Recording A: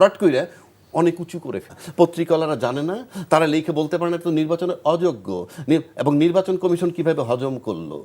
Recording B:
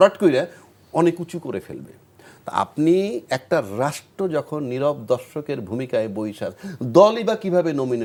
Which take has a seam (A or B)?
A